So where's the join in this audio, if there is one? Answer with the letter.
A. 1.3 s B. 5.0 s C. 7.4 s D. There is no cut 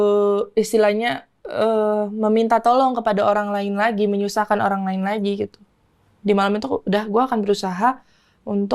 D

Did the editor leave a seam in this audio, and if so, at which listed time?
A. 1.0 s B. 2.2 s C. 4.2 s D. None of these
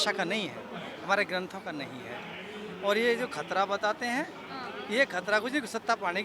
D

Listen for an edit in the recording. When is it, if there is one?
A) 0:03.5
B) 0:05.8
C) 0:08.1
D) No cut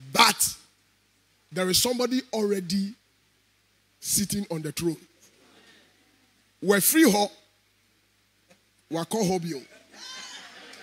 D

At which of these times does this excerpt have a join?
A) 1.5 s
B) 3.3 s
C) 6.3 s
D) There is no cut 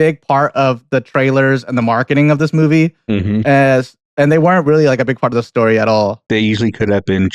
C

